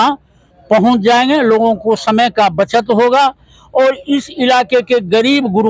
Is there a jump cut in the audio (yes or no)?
no